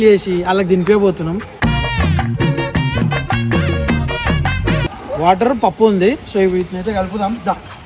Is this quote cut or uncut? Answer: cut